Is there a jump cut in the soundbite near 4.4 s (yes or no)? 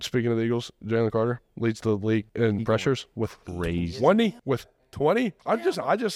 yes